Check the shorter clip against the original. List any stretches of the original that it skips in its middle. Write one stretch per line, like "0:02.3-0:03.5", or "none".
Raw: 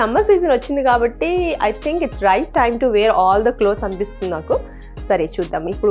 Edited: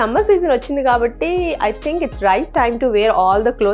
none